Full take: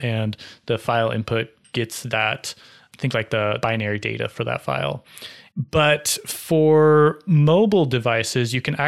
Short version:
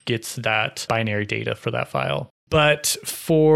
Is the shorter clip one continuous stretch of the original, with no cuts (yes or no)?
no